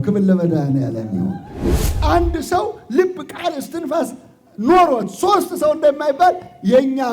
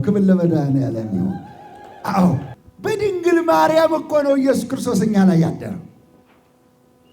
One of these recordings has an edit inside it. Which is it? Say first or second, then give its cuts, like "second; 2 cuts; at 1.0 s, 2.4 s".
first; 1 cut; at 2.0 s